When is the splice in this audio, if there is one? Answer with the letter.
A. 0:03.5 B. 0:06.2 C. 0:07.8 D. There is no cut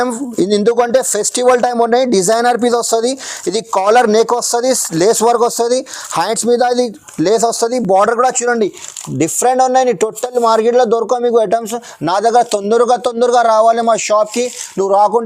D